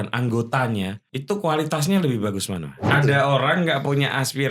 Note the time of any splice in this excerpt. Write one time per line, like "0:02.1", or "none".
0:01.1
0:02.8